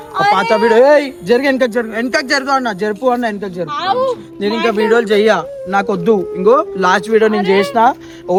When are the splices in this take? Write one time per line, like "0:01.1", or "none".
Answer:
none